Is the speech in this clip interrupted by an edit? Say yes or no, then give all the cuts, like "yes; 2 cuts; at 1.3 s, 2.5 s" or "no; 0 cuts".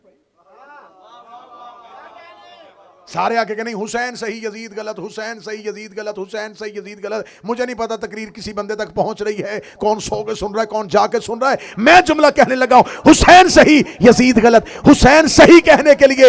no; 0 cuts